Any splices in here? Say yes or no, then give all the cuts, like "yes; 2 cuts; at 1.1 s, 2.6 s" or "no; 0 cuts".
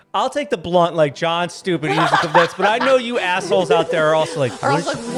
no; 0 cuts